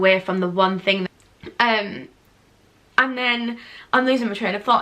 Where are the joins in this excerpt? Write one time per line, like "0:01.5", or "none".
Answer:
0:01.1